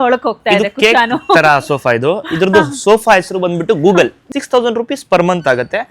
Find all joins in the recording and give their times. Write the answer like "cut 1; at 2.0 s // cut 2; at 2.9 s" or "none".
cut 1; at 4.2 s